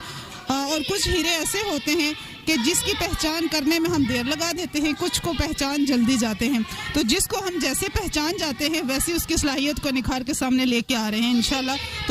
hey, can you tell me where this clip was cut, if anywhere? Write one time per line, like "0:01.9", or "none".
none